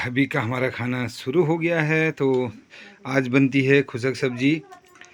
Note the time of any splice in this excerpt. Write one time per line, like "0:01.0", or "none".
none